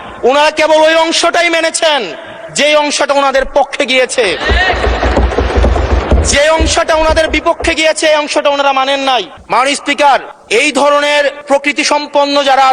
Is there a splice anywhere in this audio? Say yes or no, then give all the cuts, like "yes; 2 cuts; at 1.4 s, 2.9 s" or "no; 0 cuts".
yes; 3 cuts; at 9.4 s, 10.3 s, 11.4 s